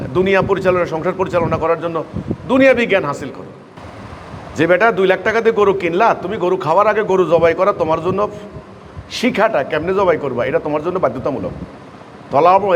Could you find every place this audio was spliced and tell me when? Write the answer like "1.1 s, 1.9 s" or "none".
3.8 s